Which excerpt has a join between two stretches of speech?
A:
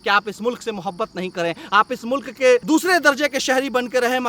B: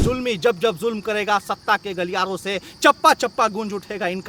A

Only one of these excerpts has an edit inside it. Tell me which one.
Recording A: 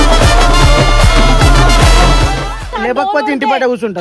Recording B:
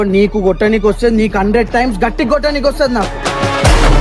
A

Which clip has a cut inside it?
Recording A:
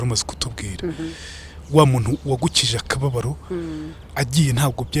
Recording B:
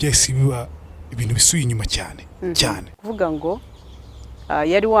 B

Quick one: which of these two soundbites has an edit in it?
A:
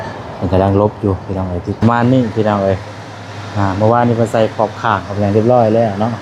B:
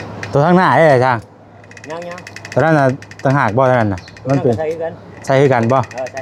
A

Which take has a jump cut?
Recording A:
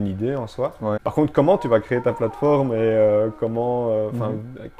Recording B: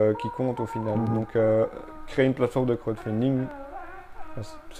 A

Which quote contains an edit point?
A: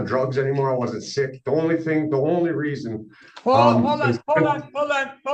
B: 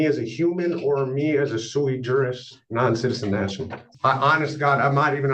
B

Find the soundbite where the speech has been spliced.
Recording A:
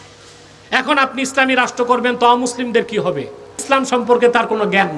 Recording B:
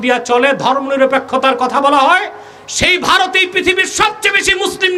A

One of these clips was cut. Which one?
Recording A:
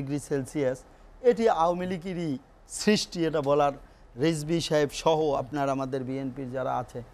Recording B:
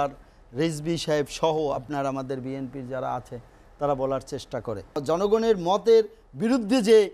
B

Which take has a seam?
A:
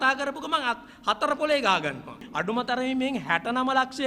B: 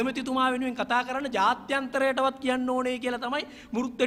A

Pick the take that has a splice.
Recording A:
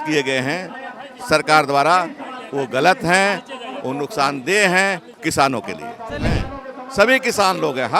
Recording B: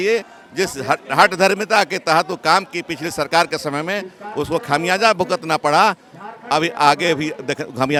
A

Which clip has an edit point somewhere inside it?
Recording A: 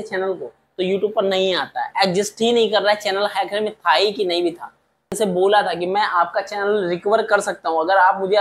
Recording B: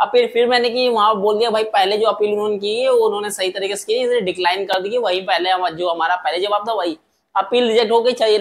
A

